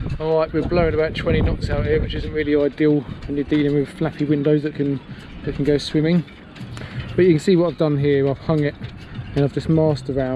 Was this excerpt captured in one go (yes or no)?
yes